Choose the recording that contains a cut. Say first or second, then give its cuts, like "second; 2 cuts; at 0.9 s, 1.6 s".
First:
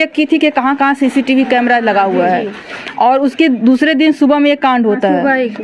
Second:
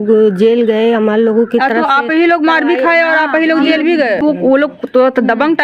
second; 1 cut; at 4.2 s